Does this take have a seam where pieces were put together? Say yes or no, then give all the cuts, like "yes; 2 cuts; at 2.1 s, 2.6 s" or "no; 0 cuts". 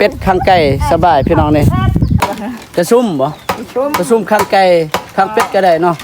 yes; 1 cut; at 2.2 s